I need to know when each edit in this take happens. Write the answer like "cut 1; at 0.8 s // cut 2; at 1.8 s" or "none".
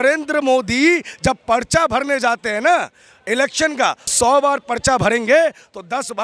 cut 1; at 4.1 s